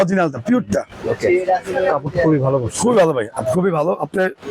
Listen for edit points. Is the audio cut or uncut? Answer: uncut